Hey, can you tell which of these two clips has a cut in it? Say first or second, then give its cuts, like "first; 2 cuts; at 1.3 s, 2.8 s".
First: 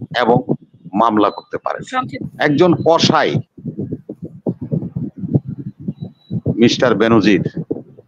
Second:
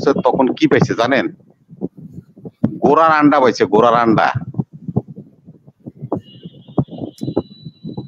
first; 1 cut; at 2.3 s